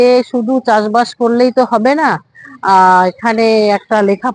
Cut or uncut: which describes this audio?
uncut